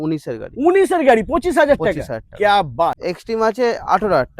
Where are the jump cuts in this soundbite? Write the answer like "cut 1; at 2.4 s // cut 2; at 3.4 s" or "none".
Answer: cut 1; at 3.0 s